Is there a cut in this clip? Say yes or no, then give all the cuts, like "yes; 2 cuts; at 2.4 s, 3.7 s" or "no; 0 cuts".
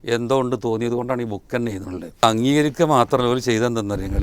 yes; 1 cut; at 2.2 s